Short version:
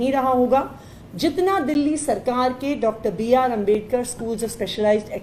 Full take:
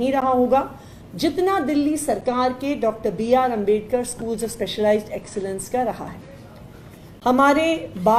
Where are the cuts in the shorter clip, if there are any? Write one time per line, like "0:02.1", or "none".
none